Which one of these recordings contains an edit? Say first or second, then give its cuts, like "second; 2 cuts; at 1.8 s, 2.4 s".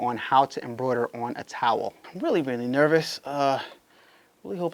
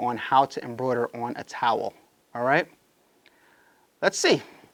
first; 1 cut; at 2.0 s